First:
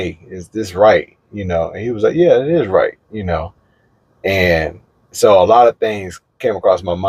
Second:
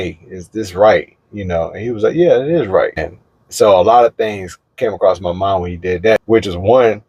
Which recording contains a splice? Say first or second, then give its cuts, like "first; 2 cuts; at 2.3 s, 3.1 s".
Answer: second; 2 cuts; at 3.1 s, 6.2 s